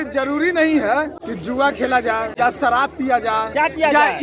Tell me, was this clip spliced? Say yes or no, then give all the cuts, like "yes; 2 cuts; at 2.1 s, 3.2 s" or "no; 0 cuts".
yes; 2 cuts; at 1.2 s, 2.3 s